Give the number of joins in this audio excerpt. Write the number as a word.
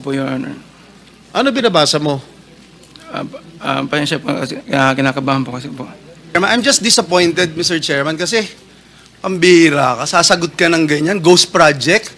one